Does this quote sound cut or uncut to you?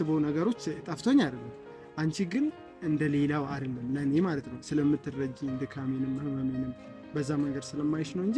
uncut